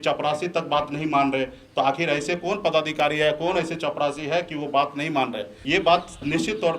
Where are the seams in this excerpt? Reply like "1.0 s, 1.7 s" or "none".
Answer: 5.5 s